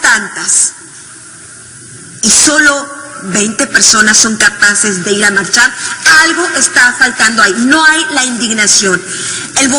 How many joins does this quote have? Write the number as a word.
one